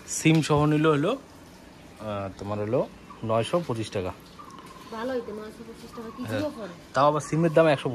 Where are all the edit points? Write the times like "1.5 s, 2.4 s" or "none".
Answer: none